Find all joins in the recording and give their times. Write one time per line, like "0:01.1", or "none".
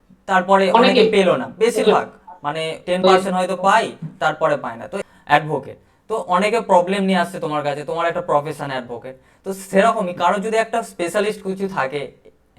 0:05.0